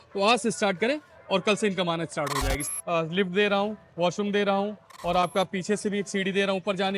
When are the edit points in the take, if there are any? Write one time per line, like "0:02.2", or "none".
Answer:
0:02.6